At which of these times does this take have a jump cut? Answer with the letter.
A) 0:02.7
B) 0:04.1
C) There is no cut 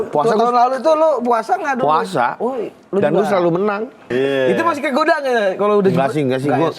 B